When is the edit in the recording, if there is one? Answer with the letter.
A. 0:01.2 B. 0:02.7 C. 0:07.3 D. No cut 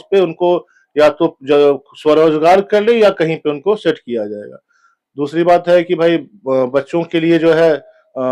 D